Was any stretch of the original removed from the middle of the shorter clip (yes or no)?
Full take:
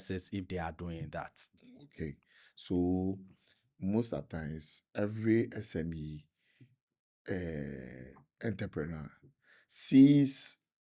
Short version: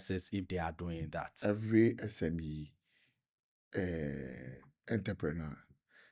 yes